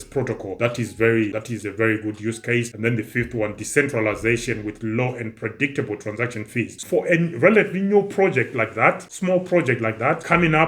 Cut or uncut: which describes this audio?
cut